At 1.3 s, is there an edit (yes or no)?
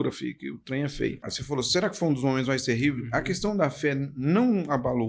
yes